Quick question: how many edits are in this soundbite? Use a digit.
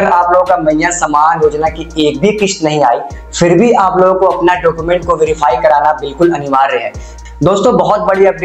1